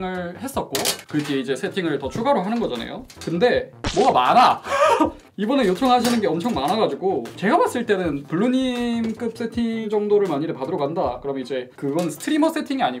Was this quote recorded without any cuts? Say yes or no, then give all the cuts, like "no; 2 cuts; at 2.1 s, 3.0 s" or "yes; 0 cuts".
yes; 0 cuts